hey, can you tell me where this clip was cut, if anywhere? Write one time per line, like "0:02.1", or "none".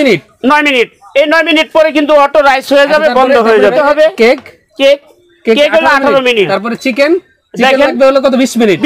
0:01.0
0:03.7
0:06.5